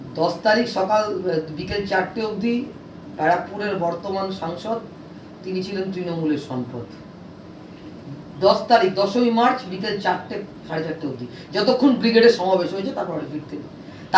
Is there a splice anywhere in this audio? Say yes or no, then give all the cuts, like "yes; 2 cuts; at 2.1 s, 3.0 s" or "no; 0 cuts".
no; 0 cuts